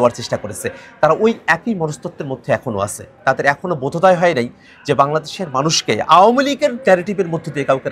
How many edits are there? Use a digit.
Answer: 0